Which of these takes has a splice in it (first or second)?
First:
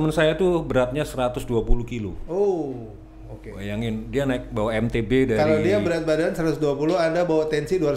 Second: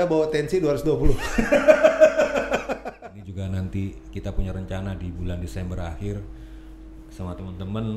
second